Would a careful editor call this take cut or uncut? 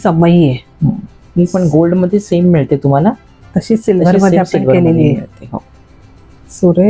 uncut